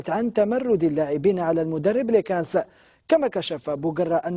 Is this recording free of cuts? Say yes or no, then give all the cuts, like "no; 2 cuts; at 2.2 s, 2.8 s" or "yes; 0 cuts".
yes; 0 cuts